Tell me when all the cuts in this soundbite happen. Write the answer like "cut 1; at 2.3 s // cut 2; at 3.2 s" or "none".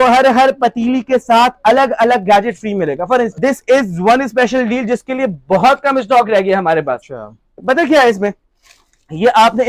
cut 1; at 3.3 s